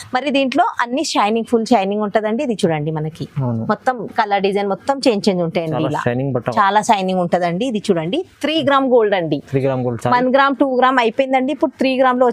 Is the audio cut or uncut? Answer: uncut